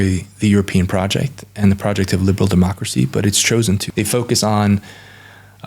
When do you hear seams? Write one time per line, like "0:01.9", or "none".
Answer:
0:03.9